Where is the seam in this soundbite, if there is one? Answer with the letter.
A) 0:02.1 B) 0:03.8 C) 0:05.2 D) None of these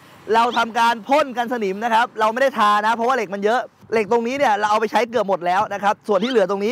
B